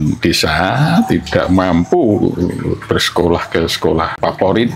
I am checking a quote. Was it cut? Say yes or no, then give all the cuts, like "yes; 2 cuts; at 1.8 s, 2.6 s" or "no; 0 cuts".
no; 0 cuts